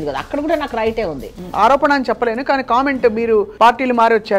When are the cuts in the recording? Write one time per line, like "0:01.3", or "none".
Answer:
0:01.4
0:03.5

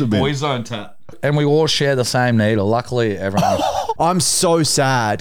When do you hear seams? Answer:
0:01.2
0:03.9

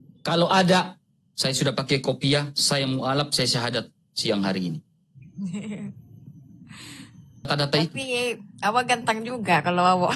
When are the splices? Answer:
0:07.5

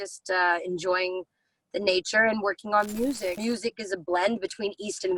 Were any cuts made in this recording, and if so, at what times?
0:03.4

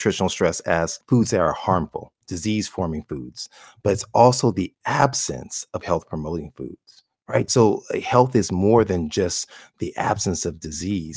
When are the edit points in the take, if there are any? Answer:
0:01.0
0:07.5

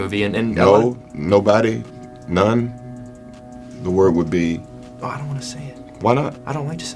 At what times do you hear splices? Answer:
none

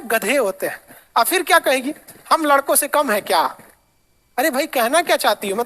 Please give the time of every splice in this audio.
0:03.2

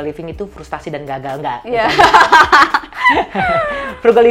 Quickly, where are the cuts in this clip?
none

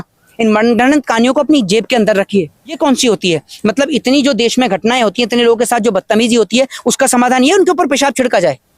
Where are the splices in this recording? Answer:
0:02.8

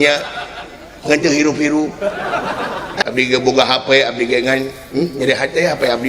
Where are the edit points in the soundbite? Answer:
0:03.0

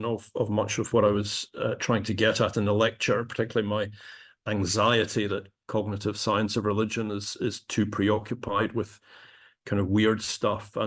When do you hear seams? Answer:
none

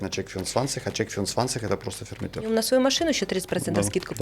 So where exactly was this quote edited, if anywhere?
0:02.5

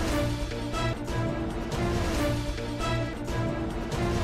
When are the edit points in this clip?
none

